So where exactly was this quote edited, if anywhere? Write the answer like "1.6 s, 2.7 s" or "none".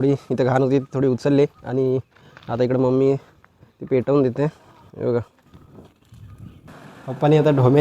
6.7 s